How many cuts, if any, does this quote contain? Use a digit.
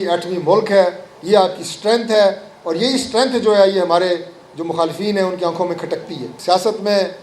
1